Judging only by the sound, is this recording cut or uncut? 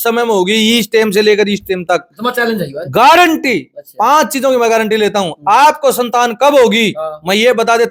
uncut